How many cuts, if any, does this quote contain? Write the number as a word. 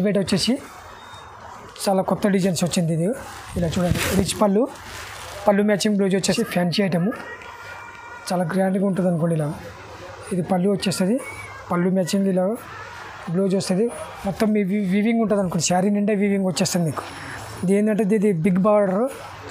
two